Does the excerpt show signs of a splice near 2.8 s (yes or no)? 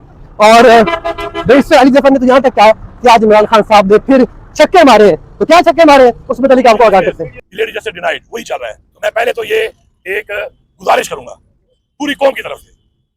no